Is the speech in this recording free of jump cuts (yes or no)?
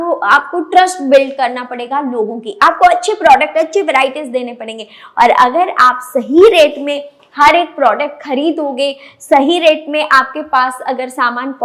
yes